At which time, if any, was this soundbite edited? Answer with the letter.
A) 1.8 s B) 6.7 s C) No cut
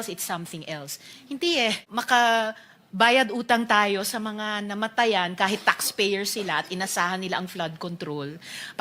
A